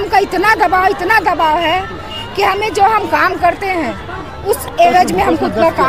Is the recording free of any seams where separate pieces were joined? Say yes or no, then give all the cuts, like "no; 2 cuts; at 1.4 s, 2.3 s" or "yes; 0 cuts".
yes; 0 cuts